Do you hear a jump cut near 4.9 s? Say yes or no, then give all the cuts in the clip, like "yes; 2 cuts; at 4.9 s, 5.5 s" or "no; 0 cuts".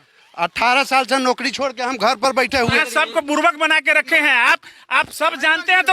no; 1 cut; at 2.8 s